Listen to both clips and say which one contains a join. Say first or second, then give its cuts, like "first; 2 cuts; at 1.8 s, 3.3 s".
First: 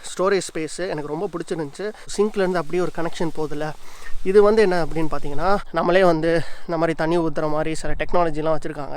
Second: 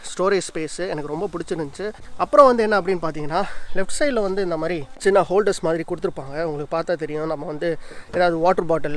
first; 2 cuts; at 2.0 s, 5.6 s